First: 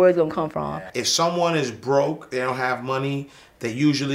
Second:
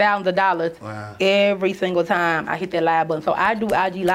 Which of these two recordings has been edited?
first; 1 cut; at 0.9 s

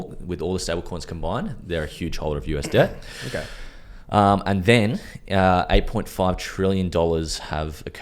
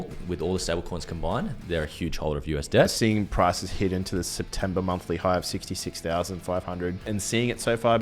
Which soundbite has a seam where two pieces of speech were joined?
second; 2 cuts; at 2.9 s, 7.0 s

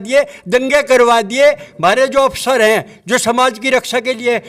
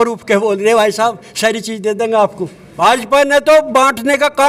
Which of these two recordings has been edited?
second; 1 cut; at 2.6 s

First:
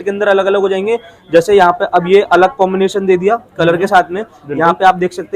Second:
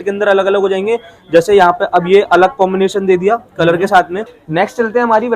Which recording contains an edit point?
second; 1 cut; at 4.3 s

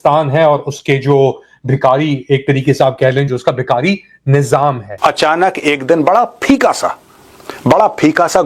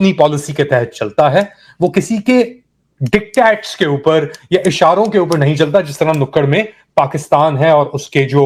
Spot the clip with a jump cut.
first; 1 cut; at 4.9 s

